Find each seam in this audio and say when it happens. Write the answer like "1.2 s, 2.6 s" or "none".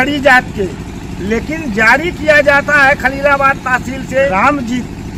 none